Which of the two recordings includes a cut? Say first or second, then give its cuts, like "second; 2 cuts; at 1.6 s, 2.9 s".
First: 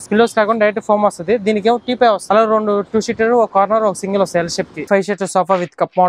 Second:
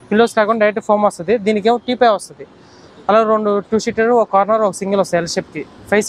first; 2 cuts; at 2.2 s, 4.9 s